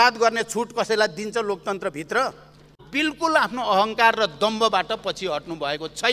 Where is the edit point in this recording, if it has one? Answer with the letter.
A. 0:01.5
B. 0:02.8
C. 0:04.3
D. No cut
B